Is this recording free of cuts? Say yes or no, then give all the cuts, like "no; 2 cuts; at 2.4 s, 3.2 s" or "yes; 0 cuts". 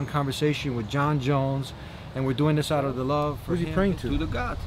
no; 1 cut; at 3.4 s